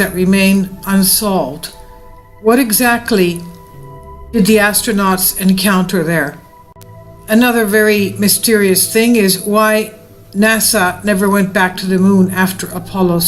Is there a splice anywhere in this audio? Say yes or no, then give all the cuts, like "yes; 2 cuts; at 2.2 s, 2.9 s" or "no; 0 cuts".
yes; 1 cut; at 9.4 s